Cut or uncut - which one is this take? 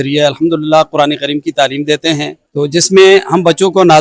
cut